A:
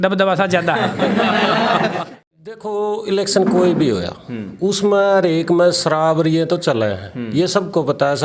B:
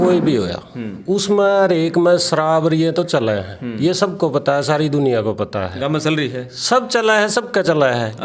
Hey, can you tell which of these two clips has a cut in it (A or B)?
A